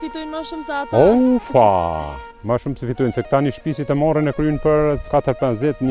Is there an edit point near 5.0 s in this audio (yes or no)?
yes